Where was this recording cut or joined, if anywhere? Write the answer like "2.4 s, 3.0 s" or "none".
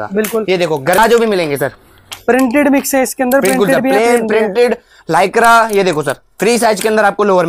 1.0 s

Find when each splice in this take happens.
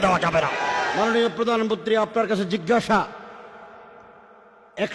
0.9 s

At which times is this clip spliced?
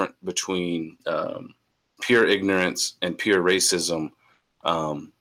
1.9 s

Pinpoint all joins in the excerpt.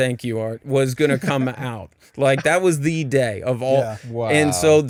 none

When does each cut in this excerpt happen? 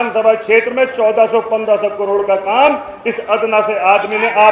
none

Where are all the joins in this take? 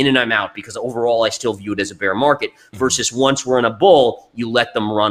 none

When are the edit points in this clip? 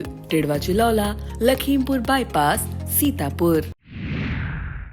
3.8 s

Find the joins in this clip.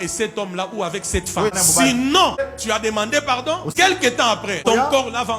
1.5 s, 2.4 s, 3.7 s, 4.6 s

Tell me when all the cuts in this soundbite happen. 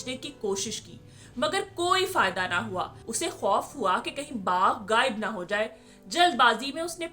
3.0 s

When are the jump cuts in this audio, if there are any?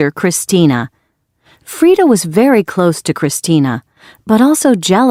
none

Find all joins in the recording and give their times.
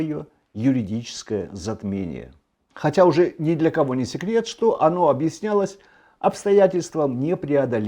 none

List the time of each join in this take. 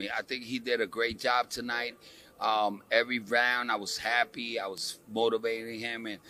1.9 s

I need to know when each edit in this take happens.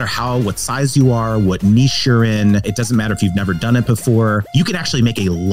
2.7 s, 4.5 s

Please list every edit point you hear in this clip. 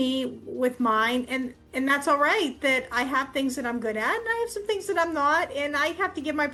none

